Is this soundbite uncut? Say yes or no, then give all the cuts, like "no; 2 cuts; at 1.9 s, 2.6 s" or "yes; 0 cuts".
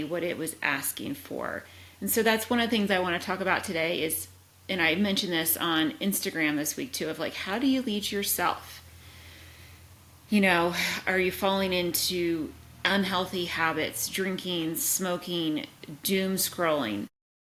yes; 0 cuts